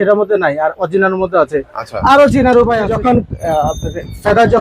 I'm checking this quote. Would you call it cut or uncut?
cut